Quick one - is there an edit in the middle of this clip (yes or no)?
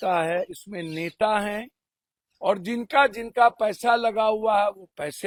no